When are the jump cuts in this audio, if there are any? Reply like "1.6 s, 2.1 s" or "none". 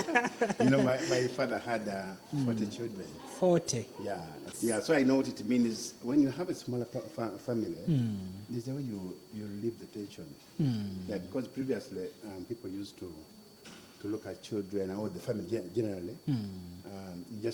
4.5 s